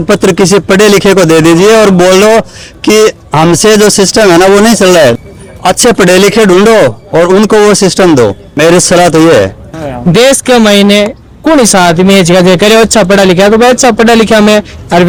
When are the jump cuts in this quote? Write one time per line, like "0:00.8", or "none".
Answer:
none